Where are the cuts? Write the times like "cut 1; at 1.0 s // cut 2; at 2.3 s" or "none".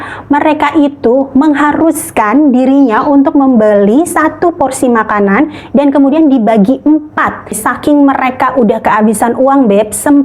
cut 1; at 7.6 s